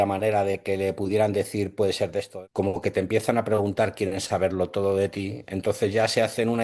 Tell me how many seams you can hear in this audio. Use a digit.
1